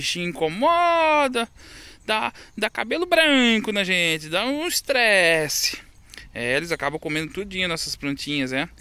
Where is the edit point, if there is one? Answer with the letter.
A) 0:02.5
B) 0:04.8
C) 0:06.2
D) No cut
D